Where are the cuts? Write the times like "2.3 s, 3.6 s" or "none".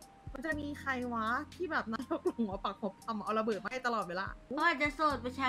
4.5 s